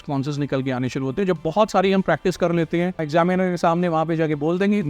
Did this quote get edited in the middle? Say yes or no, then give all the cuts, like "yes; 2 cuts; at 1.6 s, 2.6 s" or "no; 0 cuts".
yes; 1 cut; at 3.0 s